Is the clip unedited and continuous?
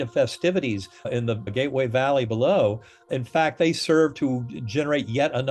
no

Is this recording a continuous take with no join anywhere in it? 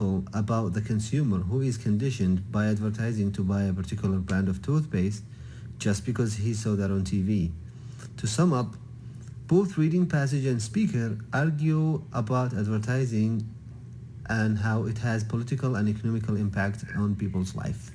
yes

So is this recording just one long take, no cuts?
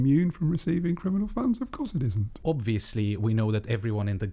no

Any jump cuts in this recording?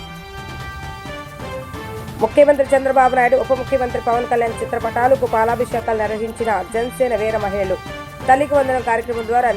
yes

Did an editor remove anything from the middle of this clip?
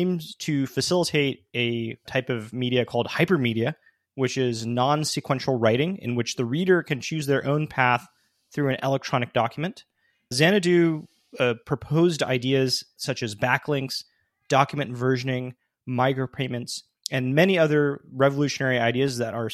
yes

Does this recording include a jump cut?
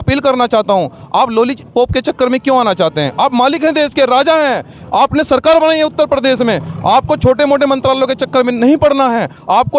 no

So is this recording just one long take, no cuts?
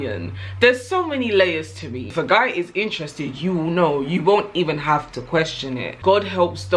no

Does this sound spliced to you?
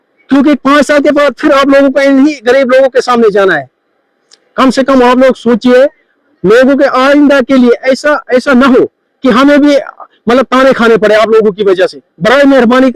no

